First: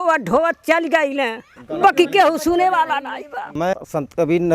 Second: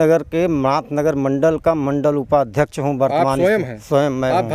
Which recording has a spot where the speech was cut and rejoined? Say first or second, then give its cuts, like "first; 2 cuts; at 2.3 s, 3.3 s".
first; 1 cut; at 3.6 s